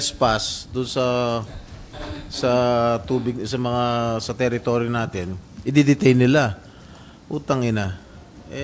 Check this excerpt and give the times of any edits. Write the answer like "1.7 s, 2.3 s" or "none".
none